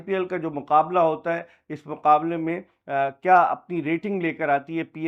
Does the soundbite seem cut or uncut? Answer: uncut